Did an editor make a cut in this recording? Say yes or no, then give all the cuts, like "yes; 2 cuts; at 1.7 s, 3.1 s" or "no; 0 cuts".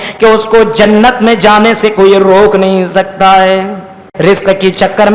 yes; 1 cut; at 4.1 s